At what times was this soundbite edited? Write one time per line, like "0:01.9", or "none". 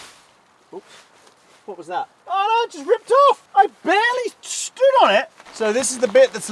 0:02.2
0:03.4
0:05.4